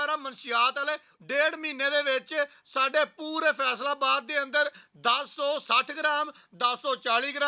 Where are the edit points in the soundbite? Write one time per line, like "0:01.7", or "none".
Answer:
0:01.1